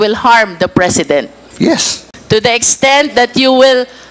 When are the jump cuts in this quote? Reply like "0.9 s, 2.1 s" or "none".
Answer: 1.7 s